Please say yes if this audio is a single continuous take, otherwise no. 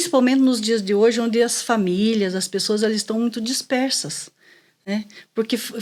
yes